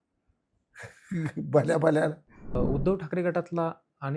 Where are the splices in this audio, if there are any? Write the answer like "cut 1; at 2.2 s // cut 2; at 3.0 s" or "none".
cut 1; at 2.6 s